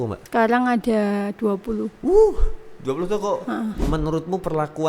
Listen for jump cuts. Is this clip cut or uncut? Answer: cut